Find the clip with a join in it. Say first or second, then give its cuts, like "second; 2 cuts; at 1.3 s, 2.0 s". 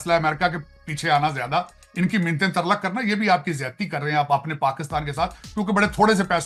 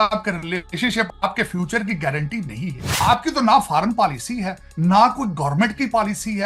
second; 2 cuts; at 1.1 s, 2.8 s